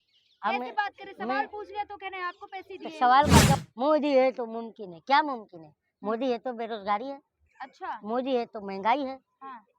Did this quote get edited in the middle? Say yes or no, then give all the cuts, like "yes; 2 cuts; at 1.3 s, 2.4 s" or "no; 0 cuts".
yes; 1 cut; at 3.6 s